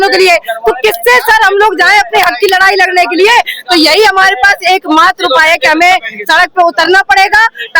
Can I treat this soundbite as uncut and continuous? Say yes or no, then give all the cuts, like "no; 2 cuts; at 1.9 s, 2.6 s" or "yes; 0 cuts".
yes; 0 cuts